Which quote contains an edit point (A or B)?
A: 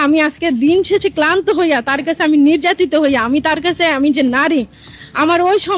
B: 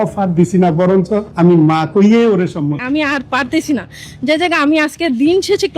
B